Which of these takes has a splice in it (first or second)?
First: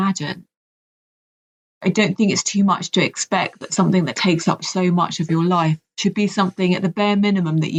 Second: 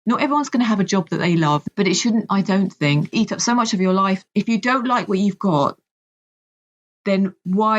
second